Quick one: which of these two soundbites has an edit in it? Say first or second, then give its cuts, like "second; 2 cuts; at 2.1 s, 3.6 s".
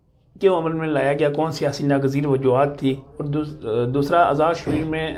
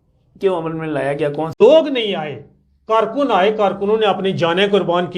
second; 1 cut; at 1.6 s